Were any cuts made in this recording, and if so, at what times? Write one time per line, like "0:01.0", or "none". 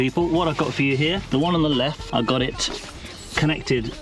0:01.2
0:02.0